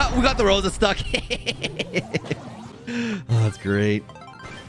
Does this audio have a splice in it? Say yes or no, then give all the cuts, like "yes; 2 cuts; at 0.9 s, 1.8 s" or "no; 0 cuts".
no; 0 cuts